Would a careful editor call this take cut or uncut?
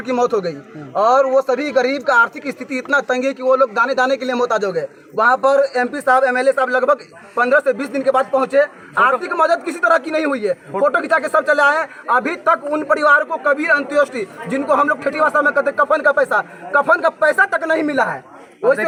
uncut